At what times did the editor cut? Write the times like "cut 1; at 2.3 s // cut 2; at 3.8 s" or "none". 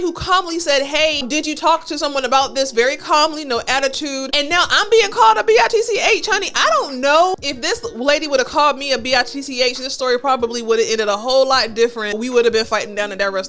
cut 1; at 1.2 s // cut 2; at 4.3 s // cut 3; at 7.3 s // cut 4; at 12.2 s